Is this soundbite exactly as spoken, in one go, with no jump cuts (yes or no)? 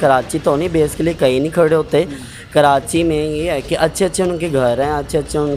yes